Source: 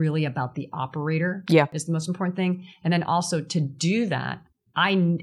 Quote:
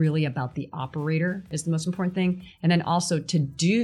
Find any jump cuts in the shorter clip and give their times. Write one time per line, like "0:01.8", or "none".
0:01.5

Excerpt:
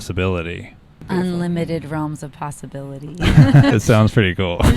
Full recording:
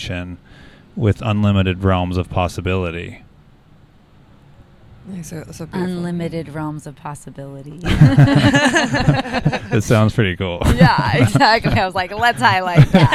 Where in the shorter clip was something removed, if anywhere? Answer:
0:00.9
0:03.7

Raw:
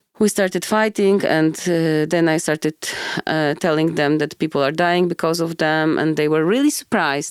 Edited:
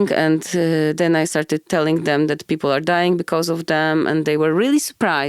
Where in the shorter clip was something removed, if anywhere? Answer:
0:01.7

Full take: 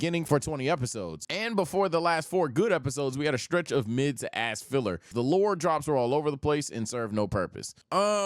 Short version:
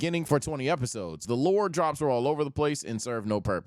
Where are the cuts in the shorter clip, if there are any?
0:01.2

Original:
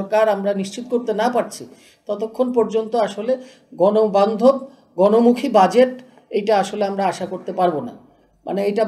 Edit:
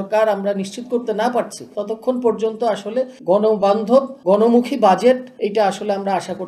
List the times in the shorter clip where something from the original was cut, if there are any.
0:01.7
0:03.1
0:04.1
0:05.3

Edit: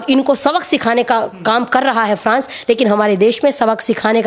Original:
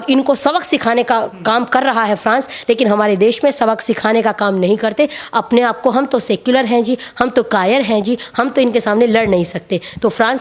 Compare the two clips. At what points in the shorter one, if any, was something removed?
none

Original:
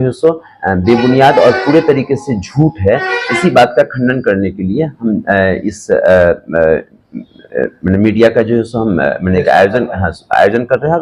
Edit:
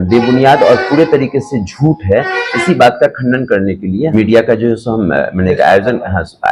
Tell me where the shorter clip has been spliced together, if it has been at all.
0:04.1

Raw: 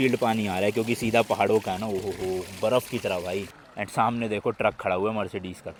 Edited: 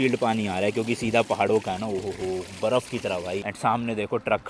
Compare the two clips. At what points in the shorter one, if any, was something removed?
0:03.5

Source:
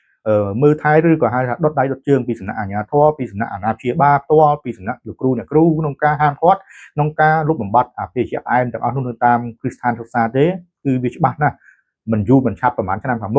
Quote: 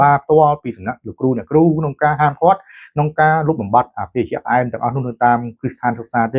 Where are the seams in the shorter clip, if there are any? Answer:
none

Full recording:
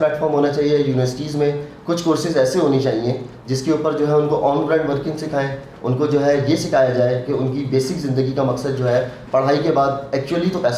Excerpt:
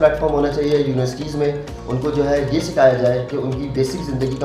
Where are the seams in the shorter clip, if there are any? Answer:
0:01.7

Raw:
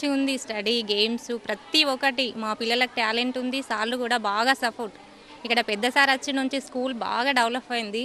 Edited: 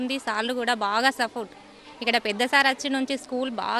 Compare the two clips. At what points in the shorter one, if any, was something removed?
none

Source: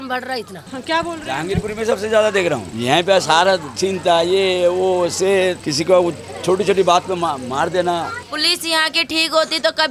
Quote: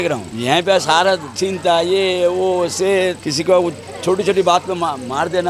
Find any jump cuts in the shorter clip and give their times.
none

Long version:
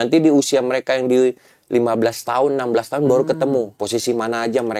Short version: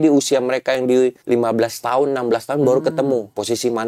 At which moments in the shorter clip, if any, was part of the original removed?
0:01.2

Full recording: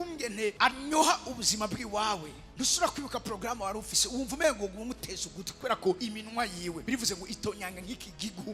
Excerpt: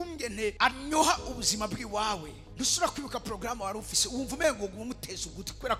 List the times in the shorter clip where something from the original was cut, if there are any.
none

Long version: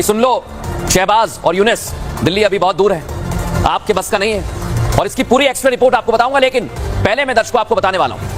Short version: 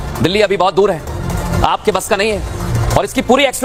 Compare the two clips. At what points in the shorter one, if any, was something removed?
none

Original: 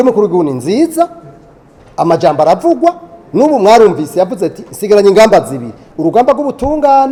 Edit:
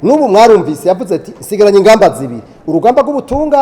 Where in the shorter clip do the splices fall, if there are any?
none

